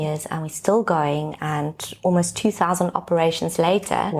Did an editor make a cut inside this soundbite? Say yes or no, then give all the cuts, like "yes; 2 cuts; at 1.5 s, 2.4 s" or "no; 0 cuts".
no; 0 cuts